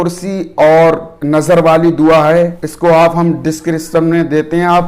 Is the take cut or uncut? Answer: cut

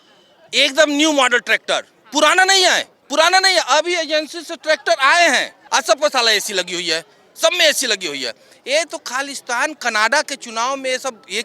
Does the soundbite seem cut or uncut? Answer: cut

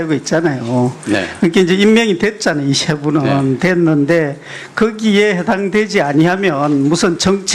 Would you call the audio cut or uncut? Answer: uncut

